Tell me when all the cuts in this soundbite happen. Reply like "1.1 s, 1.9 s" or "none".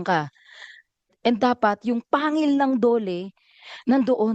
1.1 s